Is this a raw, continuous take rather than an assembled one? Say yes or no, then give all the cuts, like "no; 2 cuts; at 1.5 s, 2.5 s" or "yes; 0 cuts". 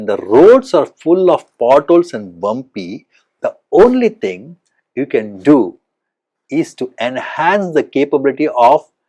yes; 0 cuts